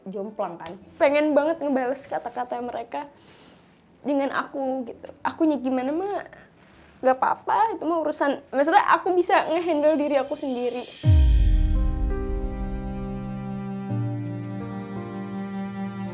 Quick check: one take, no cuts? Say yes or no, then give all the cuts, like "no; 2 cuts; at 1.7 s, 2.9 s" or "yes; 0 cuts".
no; 1 cut; at 0.9 s